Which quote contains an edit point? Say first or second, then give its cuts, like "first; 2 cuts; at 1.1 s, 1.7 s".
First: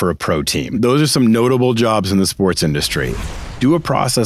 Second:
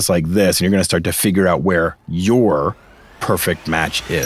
first; 2 cuts; at 0.8 s, 3.2 s